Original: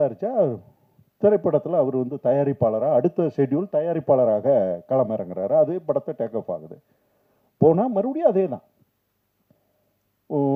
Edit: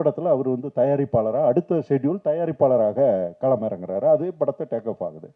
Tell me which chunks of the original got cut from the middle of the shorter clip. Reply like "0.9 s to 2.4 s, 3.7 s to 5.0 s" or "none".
none